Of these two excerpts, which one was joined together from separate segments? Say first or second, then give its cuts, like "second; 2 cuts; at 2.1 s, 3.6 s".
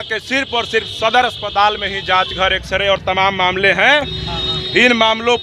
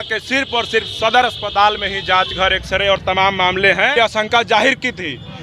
second; 1 cut; at 3.9 s